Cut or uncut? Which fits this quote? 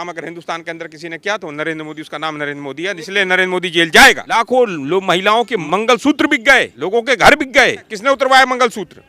cut